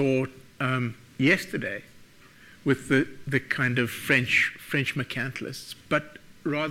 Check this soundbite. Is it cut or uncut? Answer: uncut